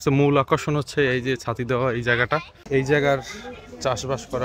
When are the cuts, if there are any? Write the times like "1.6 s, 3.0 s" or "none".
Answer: 2.5 s